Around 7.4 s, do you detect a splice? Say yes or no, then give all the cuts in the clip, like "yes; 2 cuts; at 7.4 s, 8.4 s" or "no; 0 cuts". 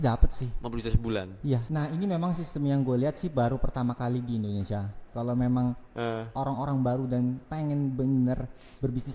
no; 2 cuts; at 1.6 s, 5.0 s